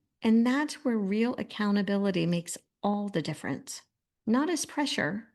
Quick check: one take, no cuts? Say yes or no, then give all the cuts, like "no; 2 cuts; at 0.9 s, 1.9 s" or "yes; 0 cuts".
yes; 0 cuts